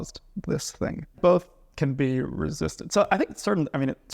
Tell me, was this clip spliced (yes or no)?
yes